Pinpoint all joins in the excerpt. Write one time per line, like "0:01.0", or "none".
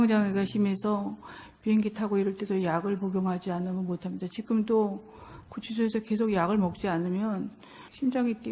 0:01.1